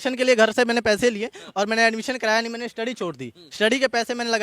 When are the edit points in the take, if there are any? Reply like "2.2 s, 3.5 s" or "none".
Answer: none

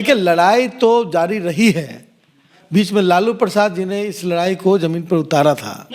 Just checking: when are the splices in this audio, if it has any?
none

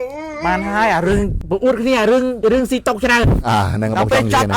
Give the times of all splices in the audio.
1.4 s, 2.4 s

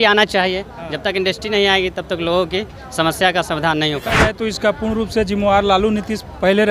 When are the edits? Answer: 4.3 s

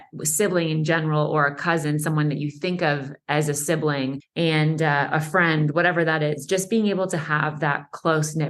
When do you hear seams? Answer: 4.2 s

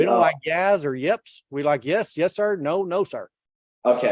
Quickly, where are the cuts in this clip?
none

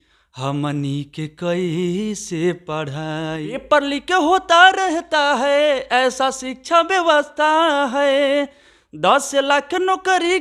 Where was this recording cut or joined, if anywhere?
3.6 s

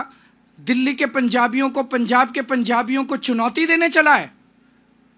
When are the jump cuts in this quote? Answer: none

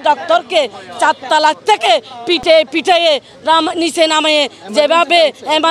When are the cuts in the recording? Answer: none

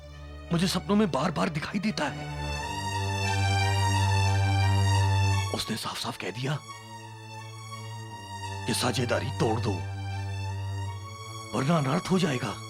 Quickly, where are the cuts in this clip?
none

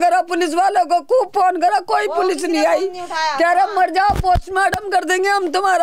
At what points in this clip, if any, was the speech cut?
none

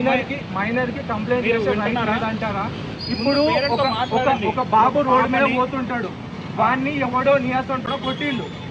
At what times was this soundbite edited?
none

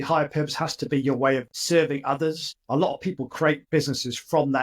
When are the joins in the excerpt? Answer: 2.6 s, 3.6 s

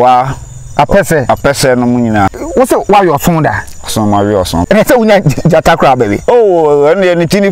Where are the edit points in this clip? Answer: 2.3 s, 4.6 s

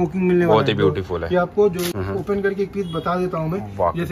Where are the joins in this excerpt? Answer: 2.0 s

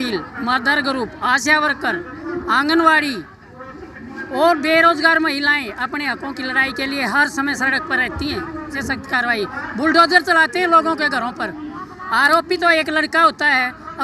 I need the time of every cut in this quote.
8.7 s

